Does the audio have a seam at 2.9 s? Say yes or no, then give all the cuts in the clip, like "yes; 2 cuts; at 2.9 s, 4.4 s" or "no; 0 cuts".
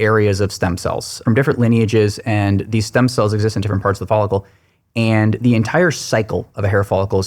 no; 1 cut; at 1.2 s